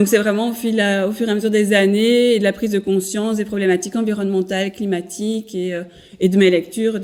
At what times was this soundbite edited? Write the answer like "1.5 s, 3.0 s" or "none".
none